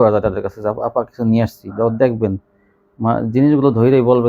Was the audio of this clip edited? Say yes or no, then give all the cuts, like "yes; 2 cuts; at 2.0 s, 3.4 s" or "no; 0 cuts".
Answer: no; 0 cuts